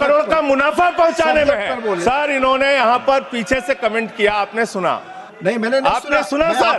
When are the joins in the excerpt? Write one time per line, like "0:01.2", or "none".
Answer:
0:02.0

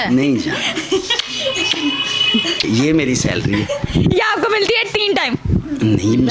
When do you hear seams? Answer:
none

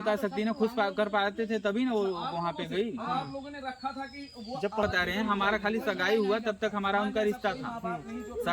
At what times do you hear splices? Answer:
0:04.8

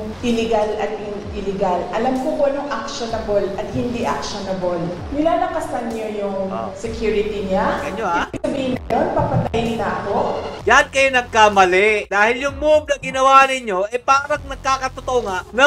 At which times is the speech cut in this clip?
0:05.0
0:10.6

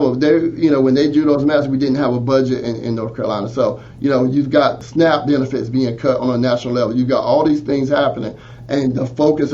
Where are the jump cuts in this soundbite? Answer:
0:04.8

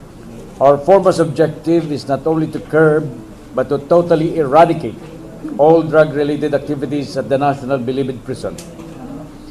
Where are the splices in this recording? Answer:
0:02.0

